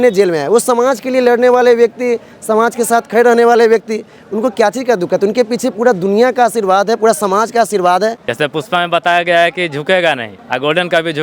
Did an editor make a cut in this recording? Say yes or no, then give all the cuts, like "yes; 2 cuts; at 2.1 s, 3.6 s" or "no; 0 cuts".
yes; 2 cuts; at 8.3 s, 10.3 s